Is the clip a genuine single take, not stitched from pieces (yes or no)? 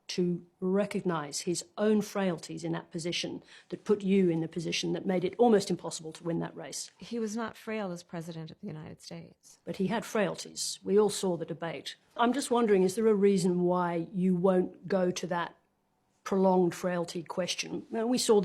no